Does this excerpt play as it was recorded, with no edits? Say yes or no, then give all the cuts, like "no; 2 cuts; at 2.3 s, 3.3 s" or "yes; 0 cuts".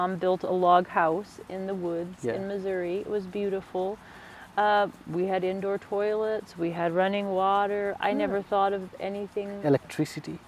yes; 0 cuts